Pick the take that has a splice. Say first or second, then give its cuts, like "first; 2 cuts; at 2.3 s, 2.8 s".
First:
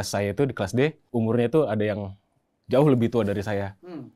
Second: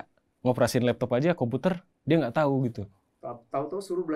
first; 1 cut; at 1.0 s